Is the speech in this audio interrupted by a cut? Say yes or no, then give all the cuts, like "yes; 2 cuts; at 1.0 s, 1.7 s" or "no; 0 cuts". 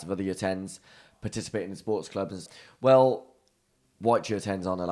yes; 1 cut; at 2.5 s